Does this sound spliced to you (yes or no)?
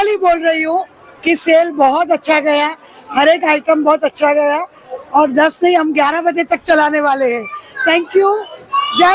no